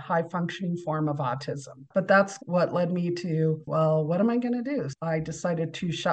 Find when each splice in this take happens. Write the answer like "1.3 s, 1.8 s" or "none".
1.8 s